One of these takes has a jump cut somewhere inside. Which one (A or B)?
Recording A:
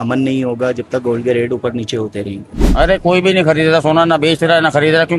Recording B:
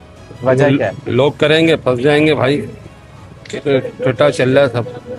A